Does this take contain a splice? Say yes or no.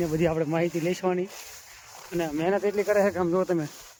no